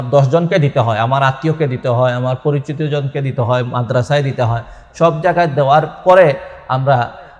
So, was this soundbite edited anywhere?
no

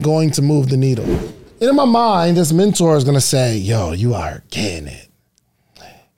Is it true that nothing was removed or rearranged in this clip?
no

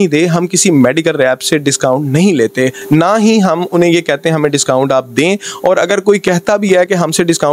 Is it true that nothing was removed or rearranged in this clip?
yes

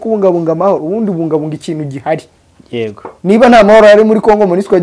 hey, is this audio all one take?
yes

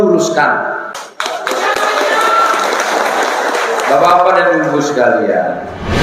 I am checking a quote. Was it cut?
yes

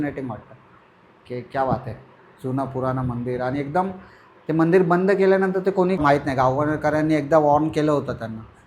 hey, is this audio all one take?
no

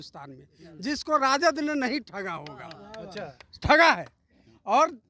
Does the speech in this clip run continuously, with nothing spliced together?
yes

